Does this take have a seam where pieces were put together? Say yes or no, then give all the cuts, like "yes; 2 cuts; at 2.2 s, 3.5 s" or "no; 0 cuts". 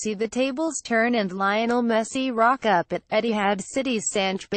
yes; 1 cut; at 3.6 s